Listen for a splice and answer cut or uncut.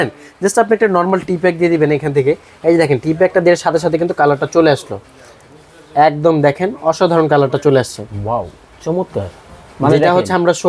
uncut